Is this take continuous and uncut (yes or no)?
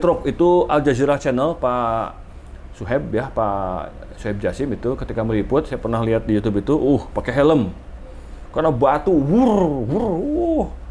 yes